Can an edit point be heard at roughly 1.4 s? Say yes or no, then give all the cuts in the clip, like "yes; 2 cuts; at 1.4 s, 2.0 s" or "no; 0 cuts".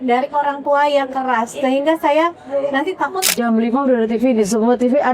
no; 1 cut; at 3.2 s